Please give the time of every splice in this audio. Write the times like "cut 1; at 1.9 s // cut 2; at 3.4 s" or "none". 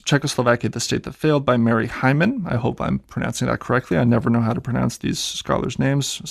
none